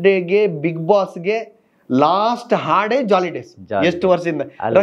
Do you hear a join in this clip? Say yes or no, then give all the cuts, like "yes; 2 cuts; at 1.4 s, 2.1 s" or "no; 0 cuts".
no; 0 cuts